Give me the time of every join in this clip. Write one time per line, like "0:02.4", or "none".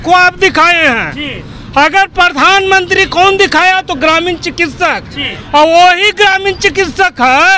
none